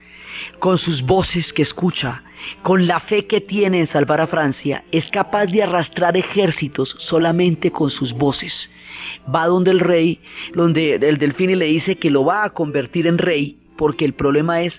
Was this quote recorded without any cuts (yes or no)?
yes